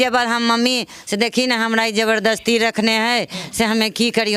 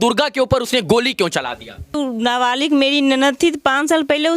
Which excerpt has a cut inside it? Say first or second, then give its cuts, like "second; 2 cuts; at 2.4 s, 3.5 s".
second; 1 cut; at 1.9 s